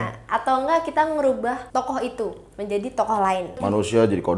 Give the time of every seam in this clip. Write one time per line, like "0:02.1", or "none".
0:01.6
0:03.6